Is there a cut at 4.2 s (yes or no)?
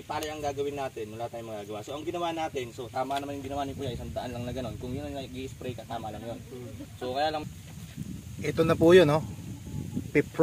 no